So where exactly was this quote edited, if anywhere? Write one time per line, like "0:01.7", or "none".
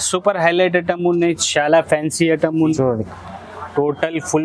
0:02.7